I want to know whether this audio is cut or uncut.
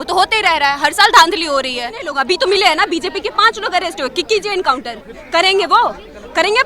cut